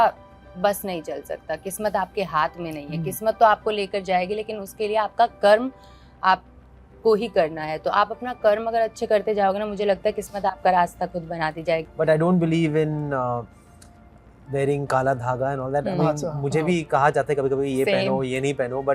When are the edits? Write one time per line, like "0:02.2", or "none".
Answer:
0:11.9